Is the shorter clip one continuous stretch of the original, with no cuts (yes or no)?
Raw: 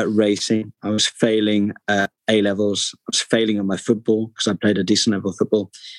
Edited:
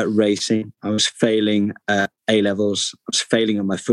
yes